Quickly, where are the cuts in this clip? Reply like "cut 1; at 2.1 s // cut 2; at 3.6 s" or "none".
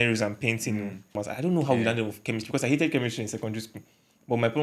cut 1; at 1.2 s